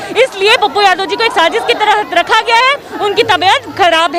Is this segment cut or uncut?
uncut